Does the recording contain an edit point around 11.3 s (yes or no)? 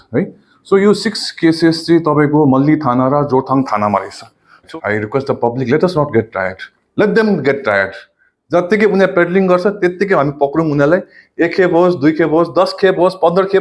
no